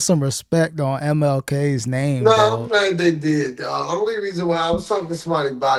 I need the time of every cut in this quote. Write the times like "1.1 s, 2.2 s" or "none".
none